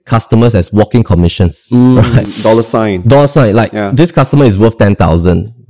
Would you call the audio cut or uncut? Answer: cut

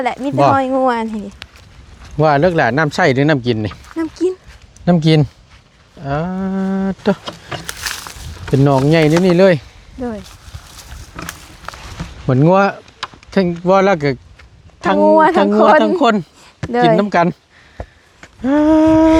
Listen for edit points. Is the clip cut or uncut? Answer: uncut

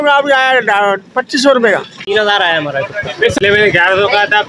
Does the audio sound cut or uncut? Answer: cut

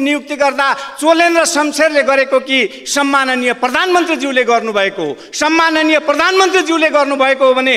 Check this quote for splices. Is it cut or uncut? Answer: uncut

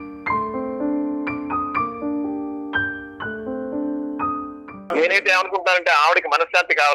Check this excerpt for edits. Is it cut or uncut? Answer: cut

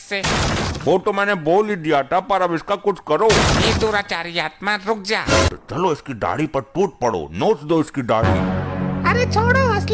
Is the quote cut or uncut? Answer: cut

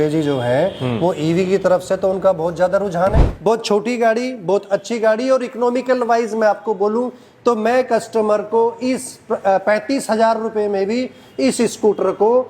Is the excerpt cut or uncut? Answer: cut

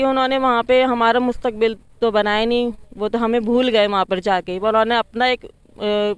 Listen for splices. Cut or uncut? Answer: uncut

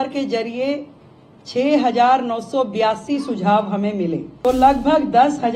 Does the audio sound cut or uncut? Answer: cut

